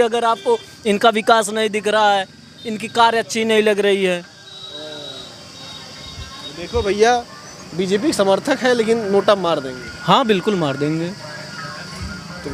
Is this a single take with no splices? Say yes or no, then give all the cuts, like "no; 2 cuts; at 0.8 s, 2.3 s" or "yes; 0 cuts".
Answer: yes; 0 cuts